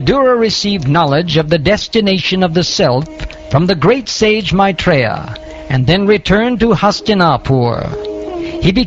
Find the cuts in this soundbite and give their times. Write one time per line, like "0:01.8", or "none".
none